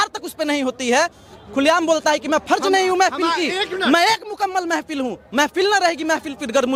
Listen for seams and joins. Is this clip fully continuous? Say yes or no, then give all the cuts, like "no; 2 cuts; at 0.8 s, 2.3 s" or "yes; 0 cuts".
yes; 0 cuts